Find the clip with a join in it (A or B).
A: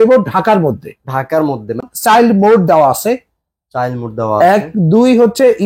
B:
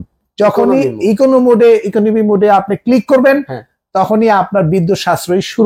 A